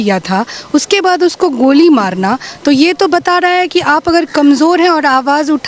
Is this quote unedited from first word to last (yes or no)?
yes